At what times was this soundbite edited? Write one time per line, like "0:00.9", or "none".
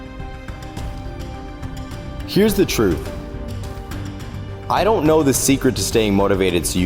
none